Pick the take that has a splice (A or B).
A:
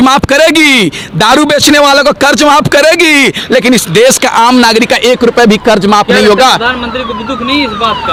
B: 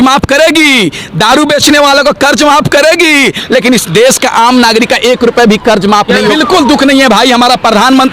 B